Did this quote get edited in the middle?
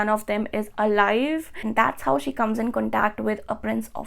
yes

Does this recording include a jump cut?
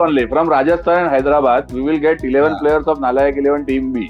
no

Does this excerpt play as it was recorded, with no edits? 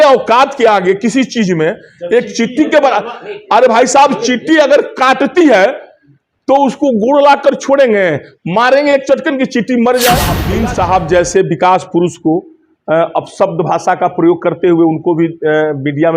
no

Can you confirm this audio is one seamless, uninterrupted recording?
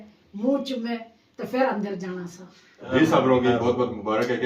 no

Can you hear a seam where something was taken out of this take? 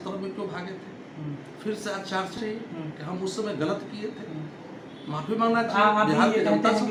no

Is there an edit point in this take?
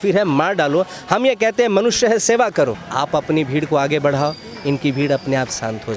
yes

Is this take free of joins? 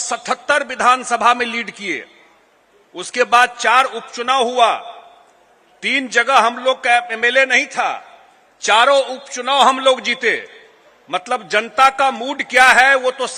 yes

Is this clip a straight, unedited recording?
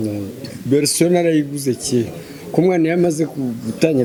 yes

